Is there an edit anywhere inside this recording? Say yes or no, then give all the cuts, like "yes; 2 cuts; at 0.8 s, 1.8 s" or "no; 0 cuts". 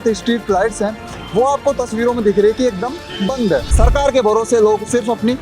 yes; 1 cut; at 3.7 s